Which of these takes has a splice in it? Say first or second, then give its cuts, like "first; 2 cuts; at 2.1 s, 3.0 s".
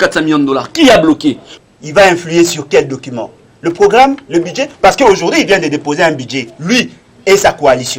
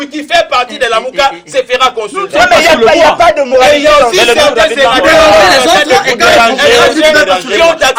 first; 1 cut; at 1.5 s